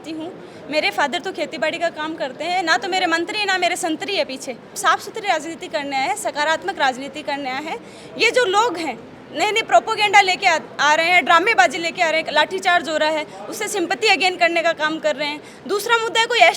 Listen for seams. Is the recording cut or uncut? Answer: cut